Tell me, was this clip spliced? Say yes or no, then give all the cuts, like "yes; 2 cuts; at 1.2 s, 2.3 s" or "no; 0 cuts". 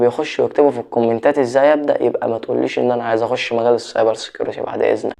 no; 0 cuts